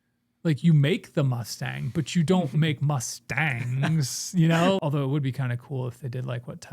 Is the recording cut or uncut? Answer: cut